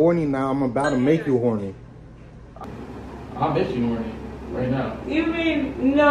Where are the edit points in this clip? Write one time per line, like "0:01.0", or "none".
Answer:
none